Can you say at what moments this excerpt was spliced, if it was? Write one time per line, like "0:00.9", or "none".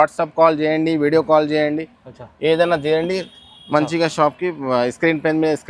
none